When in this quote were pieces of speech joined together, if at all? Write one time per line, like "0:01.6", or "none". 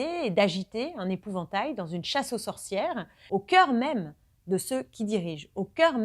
0:03.1